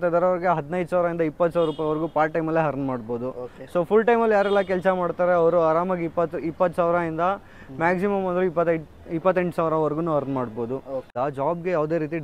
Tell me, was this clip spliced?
yes; 1 cut; at 11.1 s

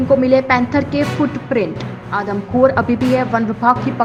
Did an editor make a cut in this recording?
no; 0 cuts

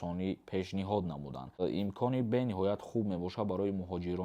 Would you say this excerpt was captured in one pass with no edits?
no; 1 cut; at 1.6 s

